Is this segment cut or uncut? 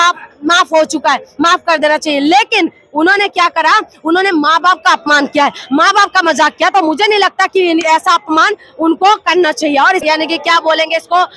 cut